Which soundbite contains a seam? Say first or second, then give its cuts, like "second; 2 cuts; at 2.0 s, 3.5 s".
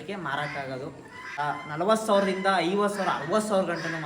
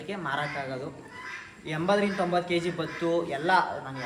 first; 1 cut; at 1.3 s